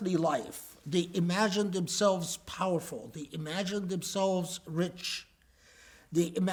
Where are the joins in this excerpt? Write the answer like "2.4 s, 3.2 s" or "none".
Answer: none